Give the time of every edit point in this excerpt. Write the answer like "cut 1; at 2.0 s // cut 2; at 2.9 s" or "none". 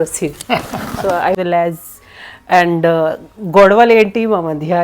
cut 1; at 1.4 s